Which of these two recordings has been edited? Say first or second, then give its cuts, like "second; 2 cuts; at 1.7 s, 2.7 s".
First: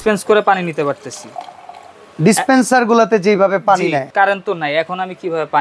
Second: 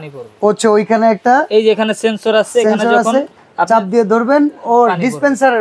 first; 1 cut; at 4.1 s